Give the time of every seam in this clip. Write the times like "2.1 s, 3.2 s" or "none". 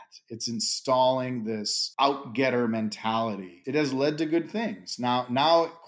1.8 s, 3.5 s